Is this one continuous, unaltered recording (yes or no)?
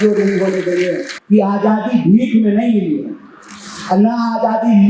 no